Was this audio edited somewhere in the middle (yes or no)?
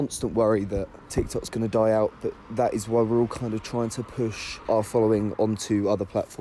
yes